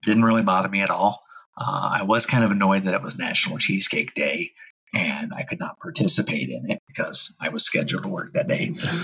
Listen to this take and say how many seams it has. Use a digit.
0